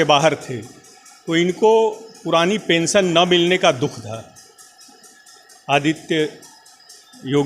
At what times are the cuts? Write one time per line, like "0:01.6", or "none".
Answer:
none